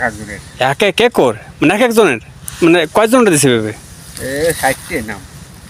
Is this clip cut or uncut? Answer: uncut